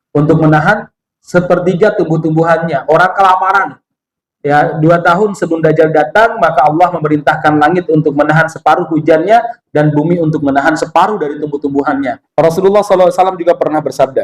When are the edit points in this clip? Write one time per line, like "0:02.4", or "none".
0:12.2